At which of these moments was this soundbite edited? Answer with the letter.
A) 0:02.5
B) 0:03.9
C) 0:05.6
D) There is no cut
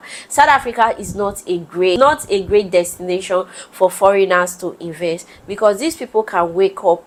D